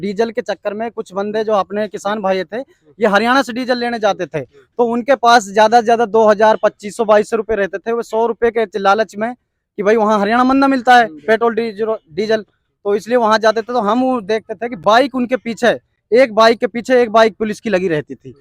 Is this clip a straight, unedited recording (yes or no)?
yes